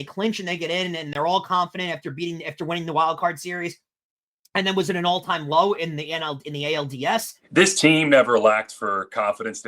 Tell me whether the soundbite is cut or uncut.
cut